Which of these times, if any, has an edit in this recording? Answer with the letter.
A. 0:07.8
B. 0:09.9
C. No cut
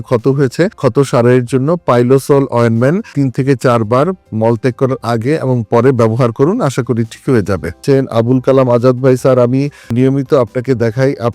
A